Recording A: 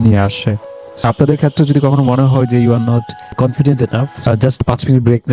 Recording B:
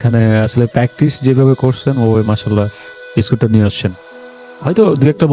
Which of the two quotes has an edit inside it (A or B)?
A